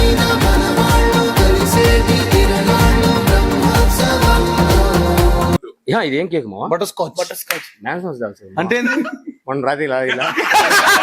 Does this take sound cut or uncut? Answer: cut